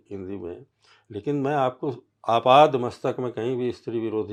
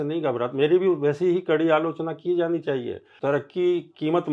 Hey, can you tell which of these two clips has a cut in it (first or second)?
second